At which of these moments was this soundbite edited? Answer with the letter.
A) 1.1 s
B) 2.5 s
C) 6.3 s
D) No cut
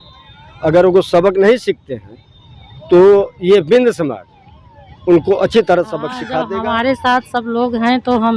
C